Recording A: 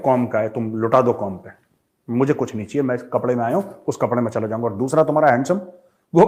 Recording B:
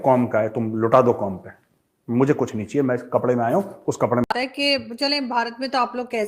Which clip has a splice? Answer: B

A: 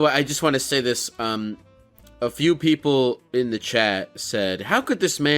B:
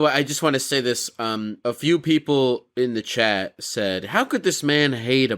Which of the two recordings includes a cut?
B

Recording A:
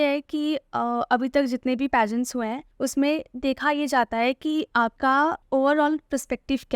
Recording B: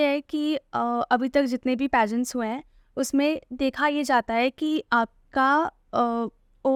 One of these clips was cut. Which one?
A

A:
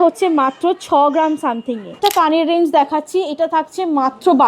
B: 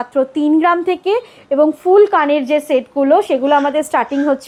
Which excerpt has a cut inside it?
A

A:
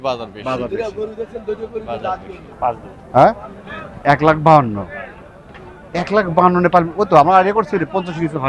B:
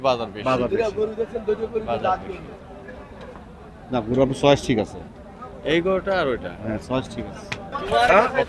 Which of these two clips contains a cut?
A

